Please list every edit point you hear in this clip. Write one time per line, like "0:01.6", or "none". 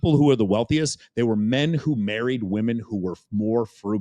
none

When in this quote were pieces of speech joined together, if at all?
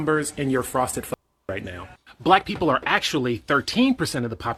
none

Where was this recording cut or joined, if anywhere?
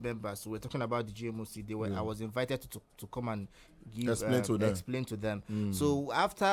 none

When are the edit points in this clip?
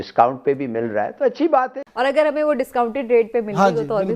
0:01.8

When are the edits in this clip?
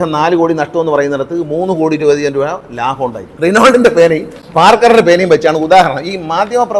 0:03.2

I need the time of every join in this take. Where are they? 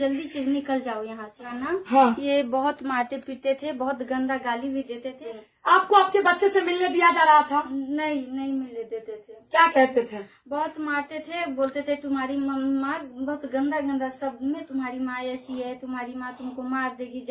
0:01.5
0:05.2

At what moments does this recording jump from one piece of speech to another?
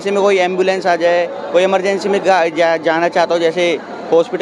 none

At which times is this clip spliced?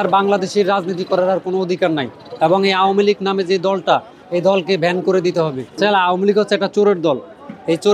0:05.6

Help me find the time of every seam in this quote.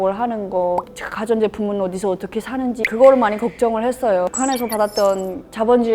0:02.8
0:04.3

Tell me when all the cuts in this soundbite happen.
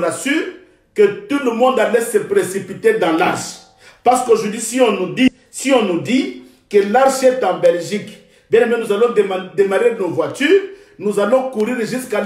0:05.3

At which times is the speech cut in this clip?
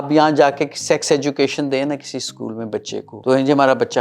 0:03.1

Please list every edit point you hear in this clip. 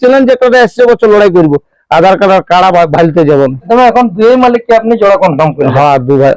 0:03.7

